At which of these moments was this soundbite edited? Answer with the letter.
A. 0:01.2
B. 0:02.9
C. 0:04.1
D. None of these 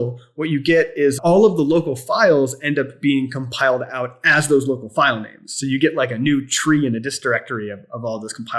A